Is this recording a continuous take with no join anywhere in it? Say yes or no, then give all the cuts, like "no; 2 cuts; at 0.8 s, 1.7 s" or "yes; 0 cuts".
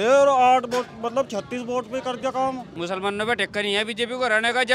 no; 1 cut; at 2.7 s